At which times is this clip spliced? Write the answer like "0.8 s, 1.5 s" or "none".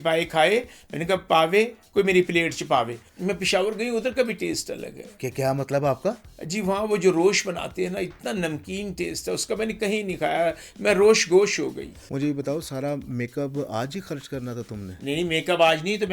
3.0 s, 11.9 s